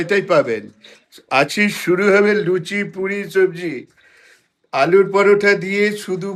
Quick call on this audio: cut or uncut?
uncut